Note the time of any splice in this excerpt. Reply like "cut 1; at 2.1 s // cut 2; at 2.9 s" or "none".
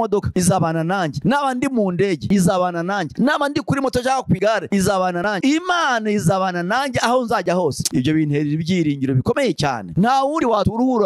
cut 1; at 5.4 s // cut 2; at 9.8 s